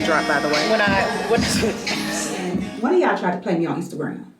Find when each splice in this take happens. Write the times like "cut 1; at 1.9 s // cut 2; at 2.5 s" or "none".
cut 1; at 2.6 s